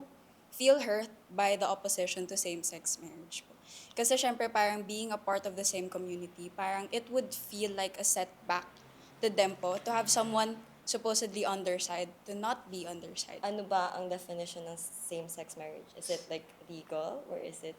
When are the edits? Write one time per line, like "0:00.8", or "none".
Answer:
0:13.2